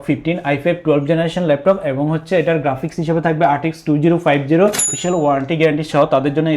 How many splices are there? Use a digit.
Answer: 1